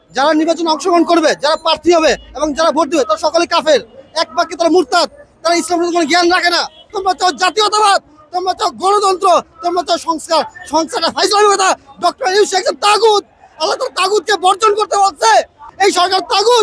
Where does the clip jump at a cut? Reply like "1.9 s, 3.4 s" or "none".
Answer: 6.9 s, 15.7 s